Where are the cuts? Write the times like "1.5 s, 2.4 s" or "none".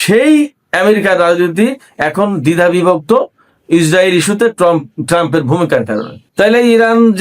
6.2 s